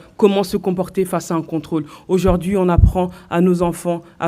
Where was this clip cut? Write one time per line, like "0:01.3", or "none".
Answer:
0:02.9